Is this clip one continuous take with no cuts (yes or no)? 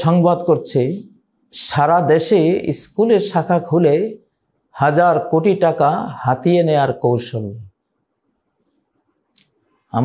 yes